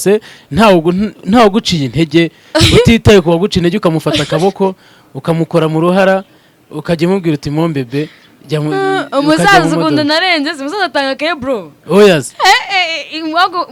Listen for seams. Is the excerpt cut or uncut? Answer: uncut